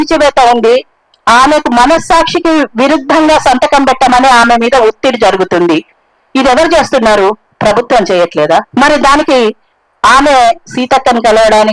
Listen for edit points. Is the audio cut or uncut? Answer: cut